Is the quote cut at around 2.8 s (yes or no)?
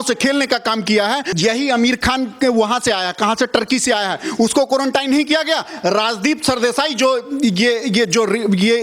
no